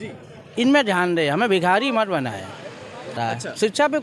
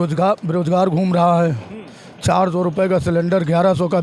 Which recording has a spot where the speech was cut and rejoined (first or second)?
first